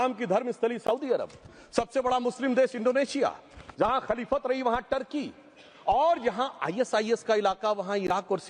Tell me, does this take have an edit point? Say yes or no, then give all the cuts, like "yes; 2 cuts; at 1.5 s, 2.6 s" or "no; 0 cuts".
no; 0 cuts